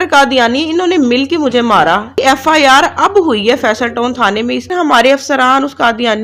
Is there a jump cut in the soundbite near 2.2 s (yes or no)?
yes